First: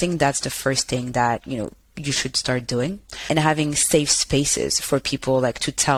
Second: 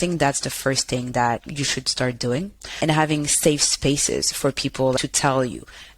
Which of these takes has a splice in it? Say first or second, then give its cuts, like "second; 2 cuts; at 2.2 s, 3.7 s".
second; 2 cuts; at 1.4 s, 5.0 s